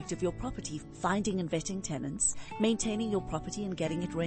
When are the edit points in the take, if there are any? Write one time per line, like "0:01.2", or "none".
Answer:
none